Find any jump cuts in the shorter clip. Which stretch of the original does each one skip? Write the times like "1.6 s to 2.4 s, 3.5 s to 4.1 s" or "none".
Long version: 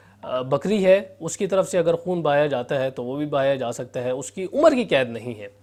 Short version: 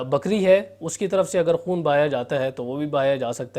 none